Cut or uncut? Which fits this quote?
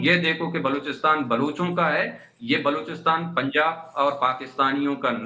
uncut